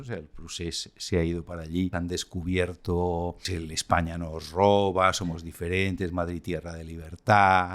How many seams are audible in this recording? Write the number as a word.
two